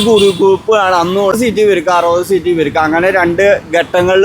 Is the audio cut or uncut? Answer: cut